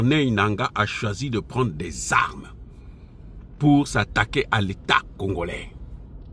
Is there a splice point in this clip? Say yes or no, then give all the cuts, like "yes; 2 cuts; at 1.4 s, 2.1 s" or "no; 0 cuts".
no; 0 cuts